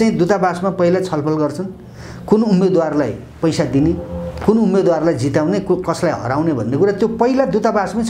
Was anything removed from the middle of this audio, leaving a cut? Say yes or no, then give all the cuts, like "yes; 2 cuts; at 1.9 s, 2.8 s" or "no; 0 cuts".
no; 0 cuts